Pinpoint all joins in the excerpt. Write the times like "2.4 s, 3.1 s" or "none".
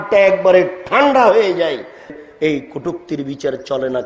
2.2 s